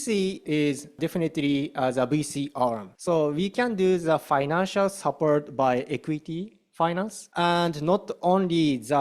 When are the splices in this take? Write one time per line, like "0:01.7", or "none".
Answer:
0:00.9
0:02.9
0:07.2